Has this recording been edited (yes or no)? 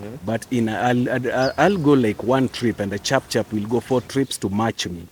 no